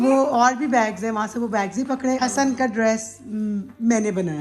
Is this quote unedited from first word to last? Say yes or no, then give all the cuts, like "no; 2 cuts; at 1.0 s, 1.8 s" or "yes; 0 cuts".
no; 1 cut; at 2.2 s